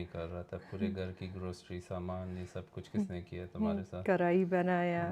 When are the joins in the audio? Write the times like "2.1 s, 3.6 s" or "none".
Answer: none